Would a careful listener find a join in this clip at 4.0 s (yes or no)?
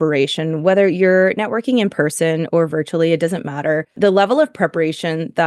yes